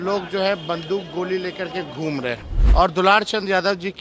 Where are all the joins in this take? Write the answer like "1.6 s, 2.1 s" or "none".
2.5 s